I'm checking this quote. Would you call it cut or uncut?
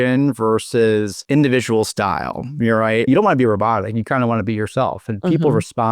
cut